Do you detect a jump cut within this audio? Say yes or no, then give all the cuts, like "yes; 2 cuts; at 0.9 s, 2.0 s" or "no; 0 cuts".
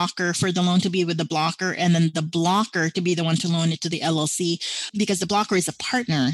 yes; 1 cut; at 4.9 s